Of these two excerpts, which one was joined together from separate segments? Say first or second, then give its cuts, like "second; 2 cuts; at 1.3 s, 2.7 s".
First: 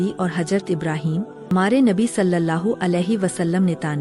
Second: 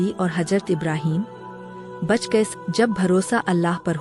first; 1 cut; at 1.5 s